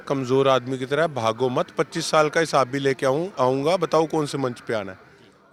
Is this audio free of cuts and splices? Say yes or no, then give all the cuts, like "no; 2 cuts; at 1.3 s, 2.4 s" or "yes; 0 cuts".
yes; 0 cuts